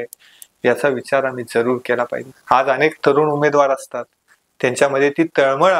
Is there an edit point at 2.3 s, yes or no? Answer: yes